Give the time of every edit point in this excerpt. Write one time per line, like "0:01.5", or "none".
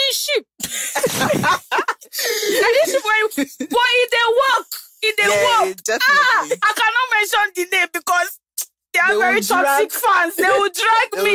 none